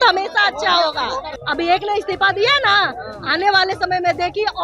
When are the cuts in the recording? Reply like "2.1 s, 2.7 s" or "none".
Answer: 1.3 s